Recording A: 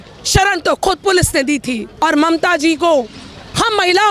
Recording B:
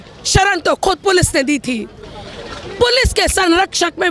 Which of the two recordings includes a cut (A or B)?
A